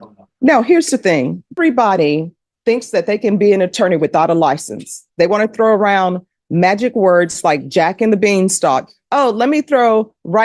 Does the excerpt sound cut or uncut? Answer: cut